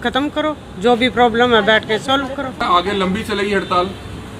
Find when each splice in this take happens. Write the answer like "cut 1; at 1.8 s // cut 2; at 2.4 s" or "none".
cut 1; at 2.6 s